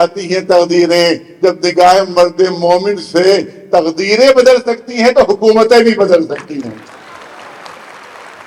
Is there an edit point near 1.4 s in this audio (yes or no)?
no